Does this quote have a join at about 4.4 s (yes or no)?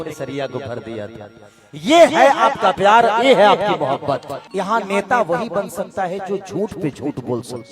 yes